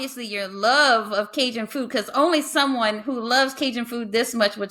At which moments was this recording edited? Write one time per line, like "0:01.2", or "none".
none

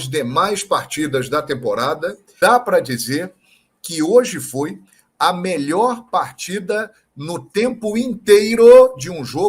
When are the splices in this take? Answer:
0:02.2

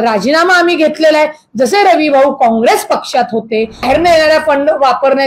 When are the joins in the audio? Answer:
0:03.8

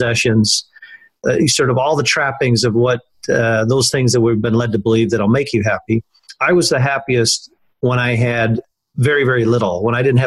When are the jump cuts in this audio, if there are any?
0:01.2
0:08.6

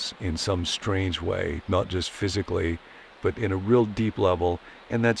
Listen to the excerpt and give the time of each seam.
none

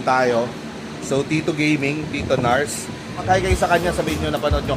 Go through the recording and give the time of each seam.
0:03.2

